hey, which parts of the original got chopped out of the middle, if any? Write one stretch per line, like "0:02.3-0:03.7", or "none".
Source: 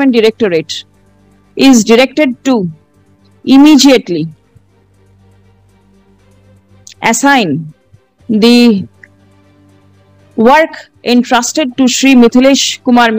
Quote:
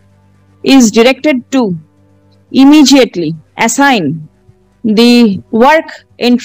0:04.4-0:06.9
0:08.9-0:10.3